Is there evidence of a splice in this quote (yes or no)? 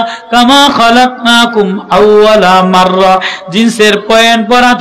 no